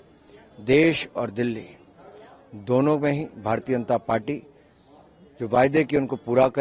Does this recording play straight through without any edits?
yes; 0 cuts

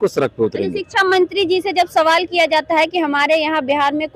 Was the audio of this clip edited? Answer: no; 0 cuts

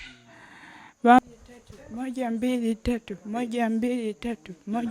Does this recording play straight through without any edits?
no; 1 cut; at 1.2 s

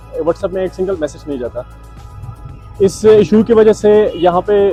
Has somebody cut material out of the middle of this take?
no; 0 cuts

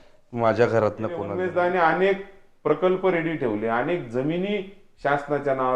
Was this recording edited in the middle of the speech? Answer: yes; 1 cut; at 1.3 s

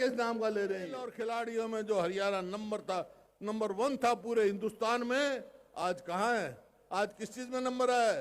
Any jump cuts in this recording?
yes; 1 cut; at 1.1 s

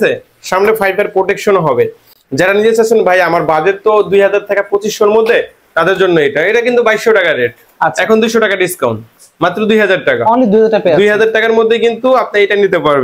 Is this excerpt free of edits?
yes; 0 cuts

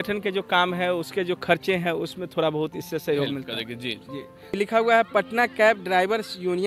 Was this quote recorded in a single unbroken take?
no; 1 cut; at 4.6 s

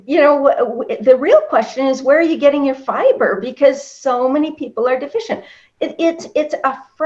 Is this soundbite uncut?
yes; 0 cuts

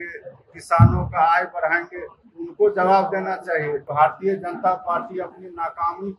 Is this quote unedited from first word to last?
no; 1 cut; at 3.9 s

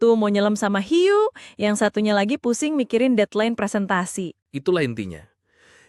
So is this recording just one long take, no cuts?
yes; 0 cuts

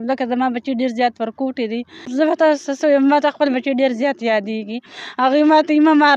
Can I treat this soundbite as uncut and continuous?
no; 1 cut; at 2.0 s

